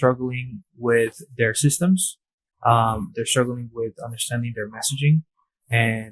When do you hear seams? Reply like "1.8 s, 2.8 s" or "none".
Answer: none